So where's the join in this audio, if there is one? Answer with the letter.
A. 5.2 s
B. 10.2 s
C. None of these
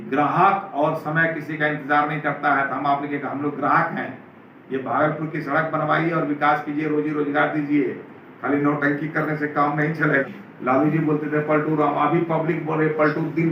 B